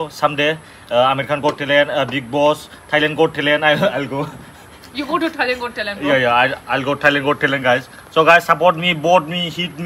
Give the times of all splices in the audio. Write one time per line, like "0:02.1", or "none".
none